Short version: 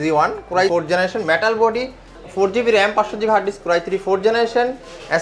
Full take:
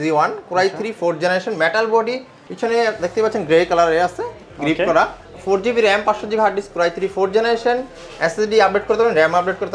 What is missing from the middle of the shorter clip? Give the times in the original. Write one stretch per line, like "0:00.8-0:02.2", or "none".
0:00.7-0:01.0
0:02.4-0:05.2